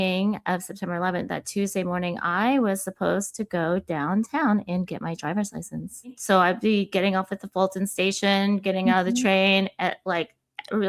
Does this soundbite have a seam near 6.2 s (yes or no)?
yes